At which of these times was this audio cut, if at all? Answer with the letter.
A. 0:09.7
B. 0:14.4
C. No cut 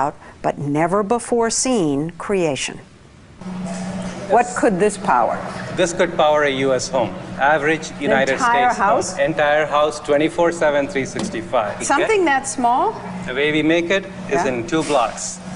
C